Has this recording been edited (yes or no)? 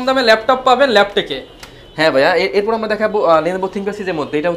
no